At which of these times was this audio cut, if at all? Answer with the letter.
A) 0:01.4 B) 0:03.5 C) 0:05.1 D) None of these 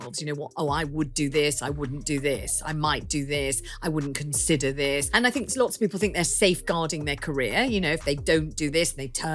C